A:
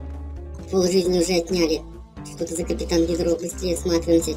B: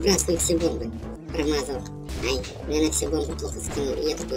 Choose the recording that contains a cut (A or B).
B